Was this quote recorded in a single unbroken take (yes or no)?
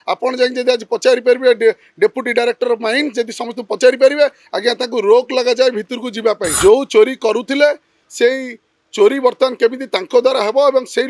no